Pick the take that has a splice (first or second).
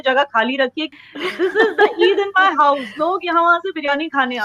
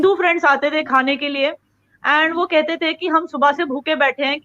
first